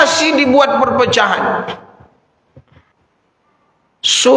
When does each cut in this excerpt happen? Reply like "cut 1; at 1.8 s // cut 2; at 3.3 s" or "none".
cut 1; at 2.9 s